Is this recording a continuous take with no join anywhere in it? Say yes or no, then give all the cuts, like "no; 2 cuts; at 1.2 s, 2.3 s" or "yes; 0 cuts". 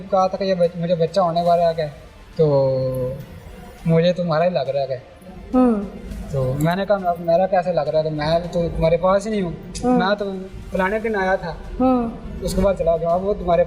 yes; 0 cuts